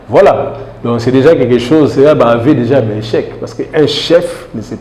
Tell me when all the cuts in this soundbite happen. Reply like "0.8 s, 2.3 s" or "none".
none